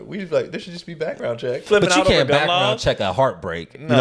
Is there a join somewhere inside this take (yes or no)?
yes